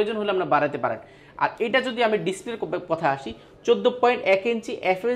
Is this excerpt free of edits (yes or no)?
yes